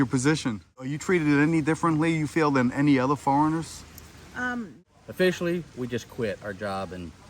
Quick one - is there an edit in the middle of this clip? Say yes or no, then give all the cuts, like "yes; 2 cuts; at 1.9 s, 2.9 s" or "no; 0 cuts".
yes; 2 cuts; at 1.0 s, 4.4 s